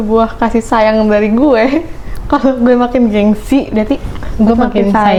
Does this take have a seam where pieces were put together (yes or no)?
no